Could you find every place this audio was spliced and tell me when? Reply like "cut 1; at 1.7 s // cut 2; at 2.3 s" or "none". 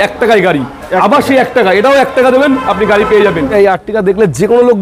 cut 1; at 3.5 s